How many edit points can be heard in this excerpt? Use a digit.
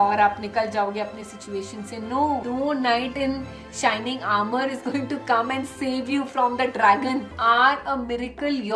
2